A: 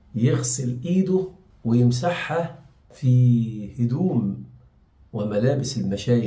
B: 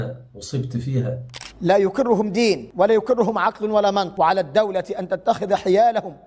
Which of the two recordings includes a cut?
B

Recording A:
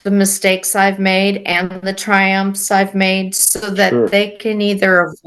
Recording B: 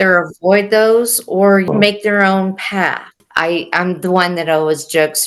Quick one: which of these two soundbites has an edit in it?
B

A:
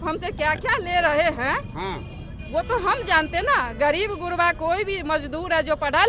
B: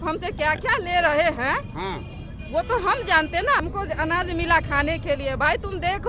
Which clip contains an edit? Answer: B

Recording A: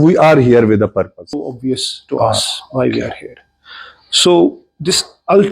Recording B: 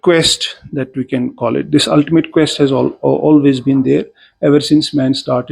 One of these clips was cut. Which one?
A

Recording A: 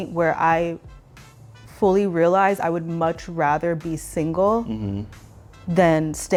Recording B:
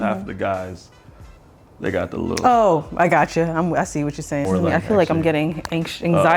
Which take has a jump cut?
B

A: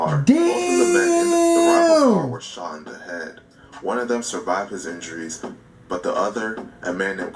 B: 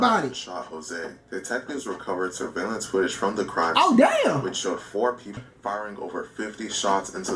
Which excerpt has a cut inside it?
B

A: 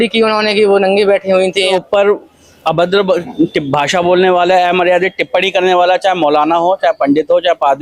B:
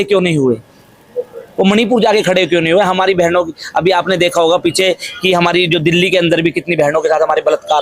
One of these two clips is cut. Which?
A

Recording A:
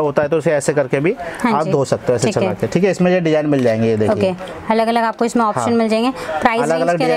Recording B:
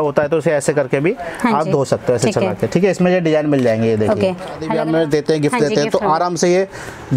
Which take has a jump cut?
B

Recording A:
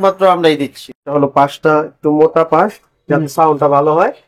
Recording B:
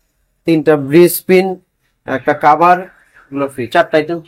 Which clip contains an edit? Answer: A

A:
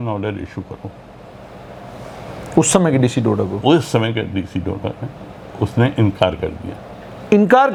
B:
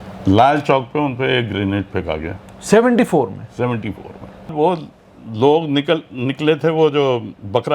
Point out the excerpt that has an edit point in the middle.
B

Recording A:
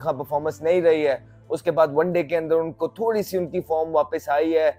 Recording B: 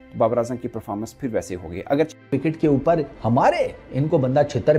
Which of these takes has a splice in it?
B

